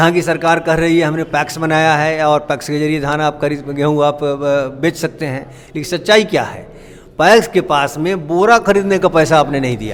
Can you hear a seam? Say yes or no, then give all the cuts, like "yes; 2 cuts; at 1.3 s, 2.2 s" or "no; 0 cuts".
no; 0 cuts